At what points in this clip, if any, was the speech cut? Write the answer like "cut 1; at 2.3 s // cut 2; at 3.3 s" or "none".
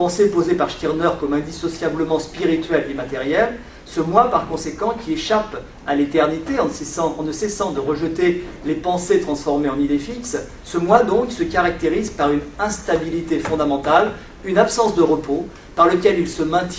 cut 1; at 4.6 s